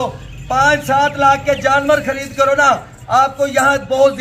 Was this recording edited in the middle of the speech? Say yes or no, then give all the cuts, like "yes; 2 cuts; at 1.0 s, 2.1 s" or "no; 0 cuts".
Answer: no; 0 cuts